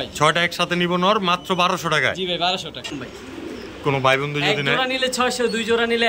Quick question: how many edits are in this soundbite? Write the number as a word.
one